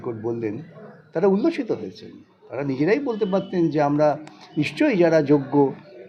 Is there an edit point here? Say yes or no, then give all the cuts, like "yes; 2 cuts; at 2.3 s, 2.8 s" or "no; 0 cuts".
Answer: no; 0 cuts